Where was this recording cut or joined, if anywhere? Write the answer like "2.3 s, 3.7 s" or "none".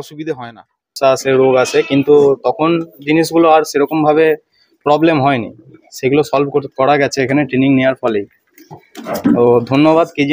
1.0 s